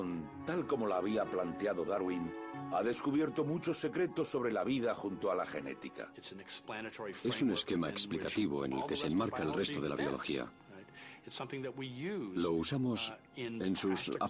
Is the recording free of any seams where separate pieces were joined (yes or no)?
yes